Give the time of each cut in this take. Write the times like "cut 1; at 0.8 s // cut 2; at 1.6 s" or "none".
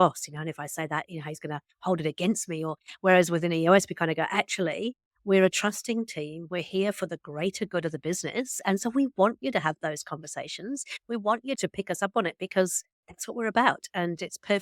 cut 1; at 11.6 s